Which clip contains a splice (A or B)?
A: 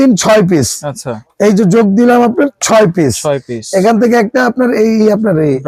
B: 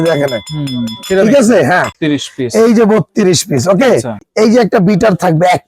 B